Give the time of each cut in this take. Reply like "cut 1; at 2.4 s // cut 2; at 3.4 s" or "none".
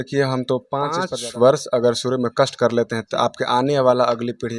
cut 1; at 1.1 s